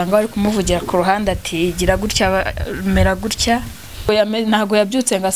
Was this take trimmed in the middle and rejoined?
yes; 1 cut; at 4.1 s

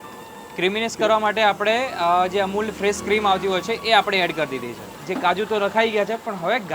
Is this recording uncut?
no; 1 cut; at 4.9 s

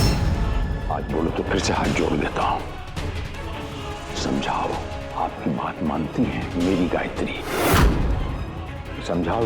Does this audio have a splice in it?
yes; 1 cut; at 3.9 s

